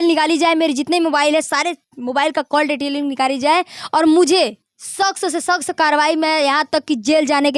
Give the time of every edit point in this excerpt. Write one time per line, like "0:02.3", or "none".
none